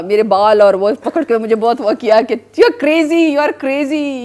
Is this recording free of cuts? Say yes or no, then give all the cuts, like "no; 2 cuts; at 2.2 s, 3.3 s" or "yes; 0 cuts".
yes; 0 cuts